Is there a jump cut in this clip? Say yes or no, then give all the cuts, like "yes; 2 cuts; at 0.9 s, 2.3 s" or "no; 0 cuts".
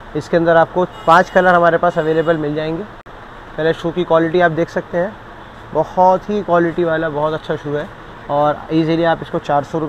no; 0 cuts